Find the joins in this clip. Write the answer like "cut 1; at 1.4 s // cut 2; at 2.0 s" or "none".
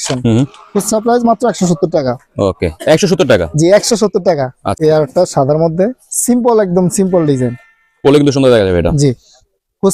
cut 1; at 4.6 s